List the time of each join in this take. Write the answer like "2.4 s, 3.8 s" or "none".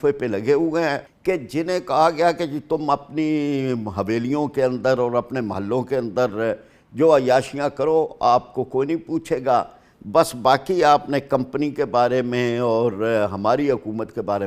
1.1 s